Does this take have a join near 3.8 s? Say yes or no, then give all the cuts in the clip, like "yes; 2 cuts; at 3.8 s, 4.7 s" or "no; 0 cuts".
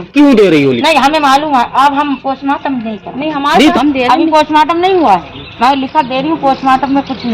yes; 1 cut; at 3.8 s